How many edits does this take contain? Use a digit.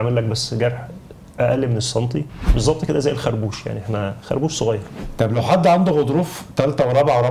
2